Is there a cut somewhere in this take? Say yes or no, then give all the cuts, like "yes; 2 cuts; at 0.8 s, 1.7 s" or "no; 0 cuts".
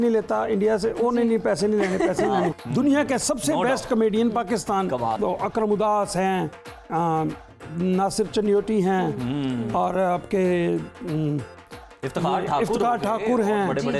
yes; 2 cuts; at 2.6 s, 5.2 s